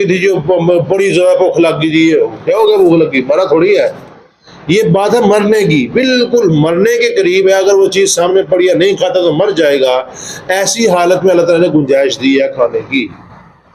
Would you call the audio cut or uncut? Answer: uncut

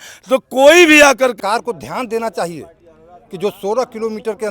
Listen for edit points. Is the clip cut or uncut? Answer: cut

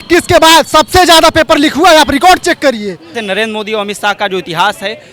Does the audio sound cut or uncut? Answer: cut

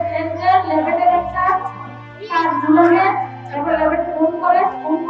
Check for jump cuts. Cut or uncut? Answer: uncut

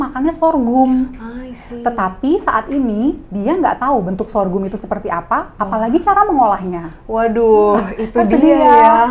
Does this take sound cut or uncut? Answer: uncut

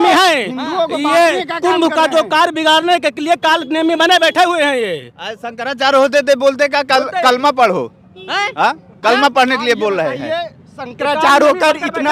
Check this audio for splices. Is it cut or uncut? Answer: uncut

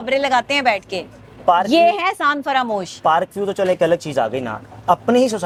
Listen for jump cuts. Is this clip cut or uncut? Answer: uncut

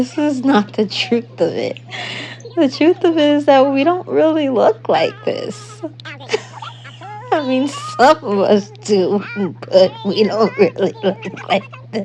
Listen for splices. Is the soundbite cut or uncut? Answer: uncut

